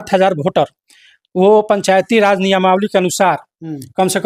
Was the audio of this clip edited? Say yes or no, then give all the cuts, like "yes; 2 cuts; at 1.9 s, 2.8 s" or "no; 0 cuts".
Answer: no; 0 cuts